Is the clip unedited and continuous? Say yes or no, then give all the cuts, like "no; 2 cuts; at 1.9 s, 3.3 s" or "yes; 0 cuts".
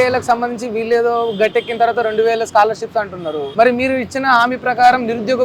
no; 1 cut; at 3.4 s